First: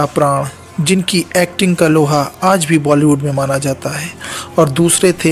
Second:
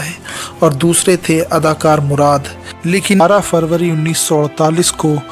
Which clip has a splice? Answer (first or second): second